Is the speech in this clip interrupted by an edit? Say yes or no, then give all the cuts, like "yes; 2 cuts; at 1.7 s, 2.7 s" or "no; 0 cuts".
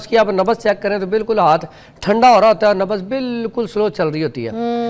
no; 0 cuts